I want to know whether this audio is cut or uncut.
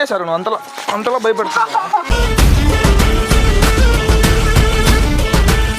cut